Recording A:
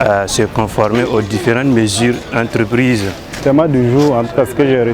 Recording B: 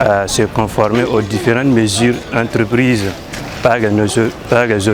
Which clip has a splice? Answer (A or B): A